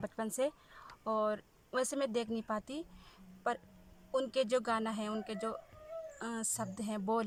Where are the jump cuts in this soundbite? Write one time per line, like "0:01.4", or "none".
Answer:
none